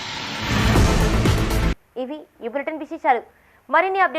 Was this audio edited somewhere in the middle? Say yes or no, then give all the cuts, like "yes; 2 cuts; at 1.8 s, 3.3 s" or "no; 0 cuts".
no; 0 cuts